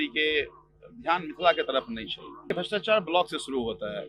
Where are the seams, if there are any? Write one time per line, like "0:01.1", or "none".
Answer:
0:02.5